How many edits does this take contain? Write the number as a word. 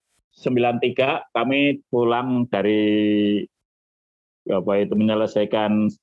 one